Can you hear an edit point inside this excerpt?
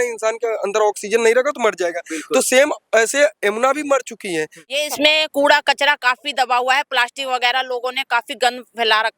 yes; 1 cut; at 4.8 s

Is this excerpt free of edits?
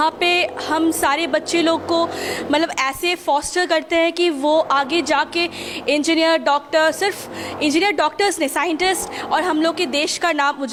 yes; 0 cuts

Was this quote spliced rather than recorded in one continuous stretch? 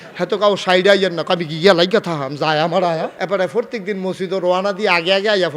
yes; 1 cut; at 3.1 s

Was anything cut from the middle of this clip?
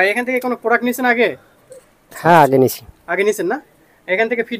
no; 0 cuts

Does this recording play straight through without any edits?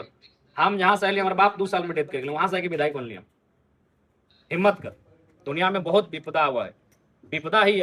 yes; 0 cuts

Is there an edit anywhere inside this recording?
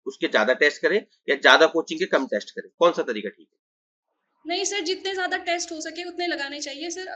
no; 0 cuts

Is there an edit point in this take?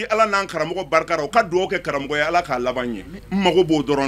yes; 1 cut; at 3.1 s

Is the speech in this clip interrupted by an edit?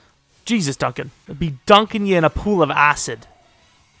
yes; 1 cut; at 1.2 s

